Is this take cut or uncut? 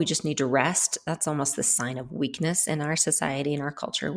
uncut